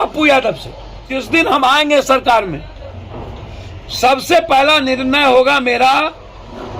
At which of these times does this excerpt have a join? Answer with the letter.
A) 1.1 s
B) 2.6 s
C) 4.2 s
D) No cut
A